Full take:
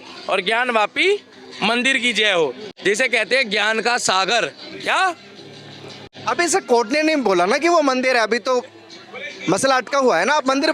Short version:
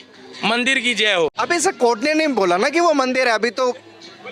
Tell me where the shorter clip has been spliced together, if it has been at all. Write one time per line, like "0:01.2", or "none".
0:01.3